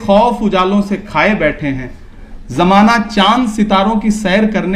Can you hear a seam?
no; 0 cuts

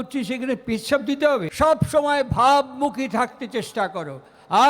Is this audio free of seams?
no; 1 cut; at 1.5 s

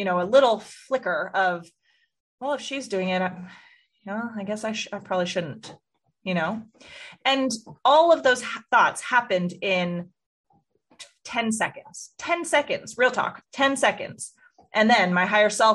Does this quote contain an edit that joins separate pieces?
no; 0 cuts

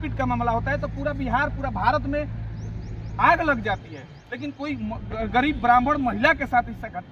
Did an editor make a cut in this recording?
no; 0 cuts

